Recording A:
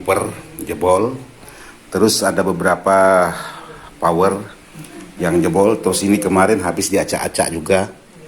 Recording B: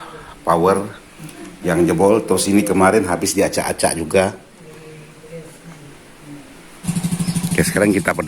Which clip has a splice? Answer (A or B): B